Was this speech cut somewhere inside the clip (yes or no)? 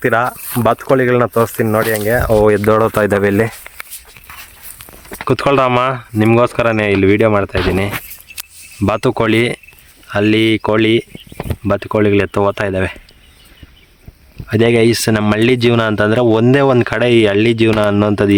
no